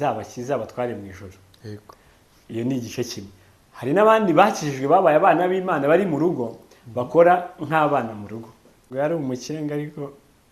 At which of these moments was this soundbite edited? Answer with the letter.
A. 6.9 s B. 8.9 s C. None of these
B